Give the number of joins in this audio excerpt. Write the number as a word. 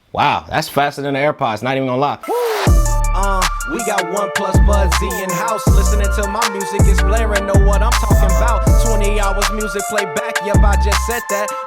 one